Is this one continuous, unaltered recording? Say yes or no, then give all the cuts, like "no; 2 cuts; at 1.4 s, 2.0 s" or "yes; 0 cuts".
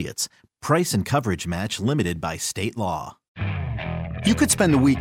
no; 1 cut; at 3.4 s